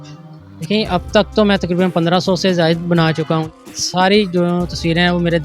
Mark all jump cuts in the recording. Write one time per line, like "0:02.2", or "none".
0:03.5